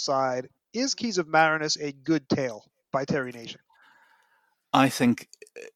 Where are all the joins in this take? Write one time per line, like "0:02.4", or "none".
none